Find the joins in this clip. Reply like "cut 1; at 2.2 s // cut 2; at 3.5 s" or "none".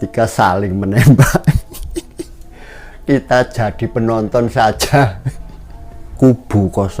cut 1; at 6.0 s